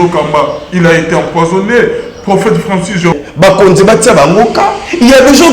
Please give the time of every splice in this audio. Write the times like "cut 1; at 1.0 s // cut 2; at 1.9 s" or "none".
cut 1; at 3.1 s